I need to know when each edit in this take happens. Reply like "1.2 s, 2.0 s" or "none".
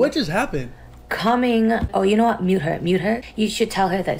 1.9 s, 3.3 s